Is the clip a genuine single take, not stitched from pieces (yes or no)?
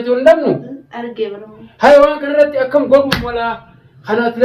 yes